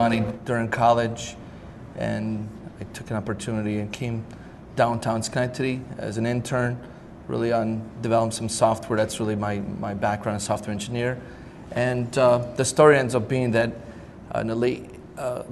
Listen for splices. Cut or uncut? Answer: uncut